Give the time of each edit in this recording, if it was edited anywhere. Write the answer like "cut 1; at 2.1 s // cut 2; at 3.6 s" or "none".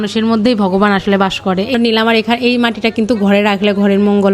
cut 1; at 1.7 s